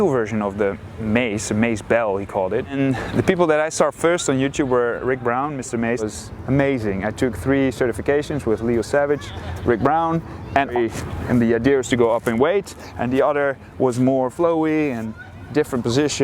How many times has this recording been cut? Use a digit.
3